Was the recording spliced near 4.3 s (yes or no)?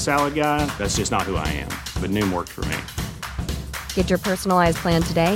no